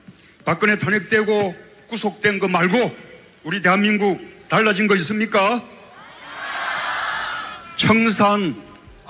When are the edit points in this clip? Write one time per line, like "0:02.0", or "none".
0:03.6